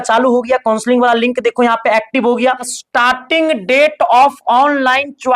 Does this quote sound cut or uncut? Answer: cut